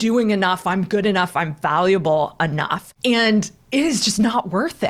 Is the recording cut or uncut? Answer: cut